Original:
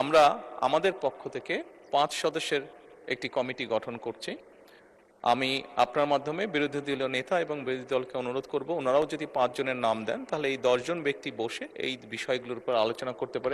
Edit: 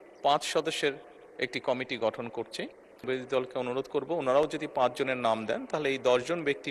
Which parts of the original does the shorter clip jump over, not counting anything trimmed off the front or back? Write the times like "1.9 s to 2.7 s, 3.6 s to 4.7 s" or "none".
4.7 s to 7.6 s